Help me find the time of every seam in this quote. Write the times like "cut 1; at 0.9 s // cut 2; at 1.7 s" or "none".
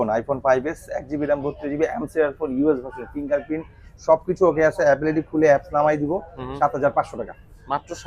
none